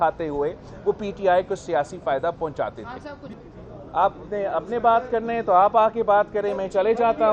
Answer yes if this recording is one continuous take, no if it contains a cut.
no